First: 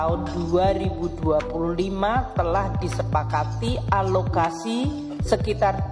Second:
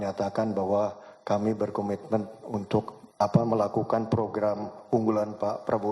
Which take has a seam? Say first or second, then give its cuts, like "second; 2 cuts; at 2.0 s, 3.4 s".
second; 1 cut; at 3.0 s